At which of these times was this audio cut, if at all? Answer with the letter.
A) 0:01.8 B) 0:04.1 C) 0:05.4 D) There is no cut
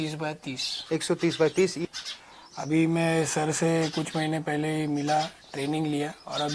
A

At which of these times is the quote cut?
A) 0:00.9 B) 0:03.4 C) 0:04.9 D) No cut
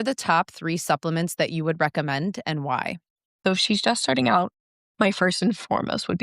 B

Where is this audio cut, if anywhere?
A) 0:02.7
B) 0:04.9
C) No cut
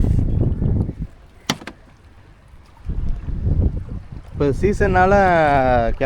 A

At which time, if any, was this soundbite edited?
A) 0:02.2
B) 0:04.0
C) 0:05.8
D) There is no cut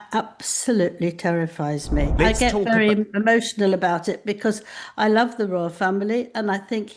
A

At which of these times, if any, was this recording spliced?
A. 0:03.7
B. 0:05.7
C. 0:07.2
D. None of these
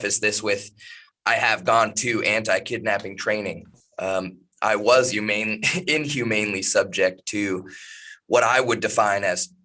D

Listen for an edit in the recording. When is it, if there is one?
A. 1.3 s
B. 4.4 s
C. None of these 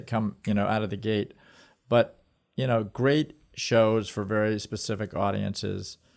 C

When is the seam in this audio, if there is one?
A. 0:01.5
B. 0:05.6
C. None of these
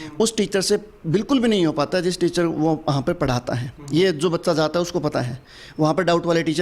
C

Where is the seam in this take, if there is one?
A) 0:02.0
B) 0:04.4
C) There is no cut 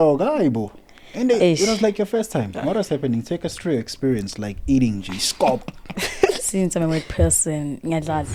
C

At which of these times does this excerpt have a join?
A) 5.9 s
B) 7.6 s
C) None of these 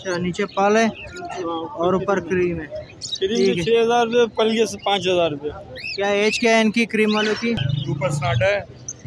B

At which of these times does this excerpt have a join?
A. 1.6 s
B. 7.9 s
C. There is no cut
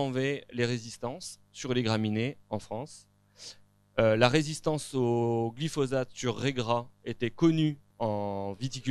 B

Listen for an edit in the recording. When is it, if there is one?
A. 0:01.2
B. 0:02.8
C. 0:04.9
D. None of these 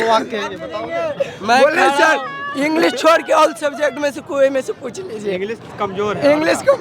D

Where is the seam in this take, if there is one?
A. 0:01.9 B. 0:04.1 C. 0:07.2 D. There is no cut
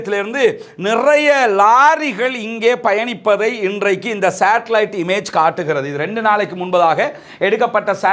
D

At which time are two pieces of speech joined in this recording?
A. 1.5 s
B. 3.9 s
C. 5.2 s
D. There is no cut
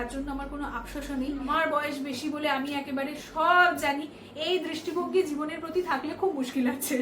A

